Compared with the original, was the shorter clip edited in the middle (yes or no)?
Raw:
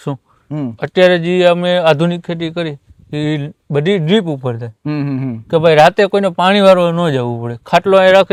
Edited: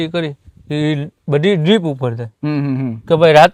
no